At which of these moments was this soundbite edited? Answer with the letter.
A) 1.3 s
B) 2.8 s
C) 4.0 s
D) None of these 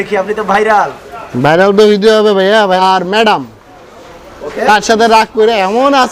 B